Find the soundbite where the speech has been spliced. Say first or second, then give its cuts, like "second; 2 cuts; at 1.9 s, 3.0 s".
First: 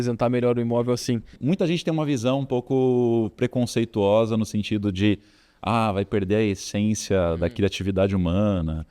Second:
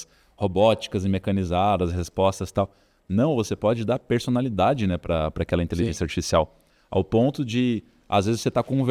first; 1 cut; at 1.3 s